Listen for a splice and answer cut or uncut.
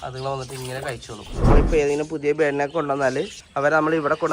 cut